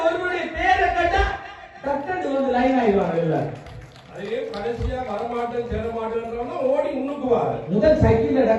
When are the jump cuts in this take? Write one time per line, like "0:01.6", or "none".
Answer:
none